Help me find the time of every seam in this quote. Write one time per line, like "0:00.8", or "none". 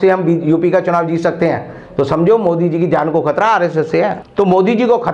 0:04.2